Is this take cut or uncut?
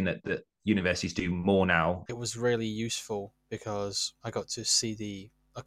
cut